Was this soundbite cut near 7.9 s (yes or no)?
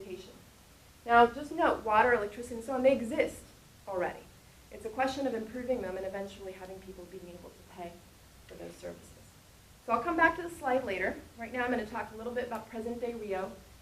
yes